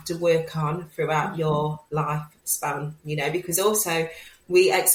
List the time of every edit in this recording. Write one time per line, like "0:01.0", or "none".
none